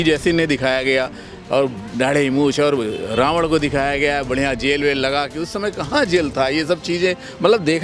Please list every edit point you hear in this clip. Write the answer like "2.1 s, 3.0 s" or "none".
none